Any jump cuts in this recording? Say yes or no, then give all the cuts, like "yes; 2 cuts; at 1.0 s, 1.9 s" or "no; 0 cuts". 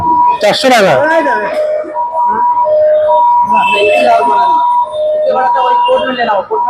no; 0 cuts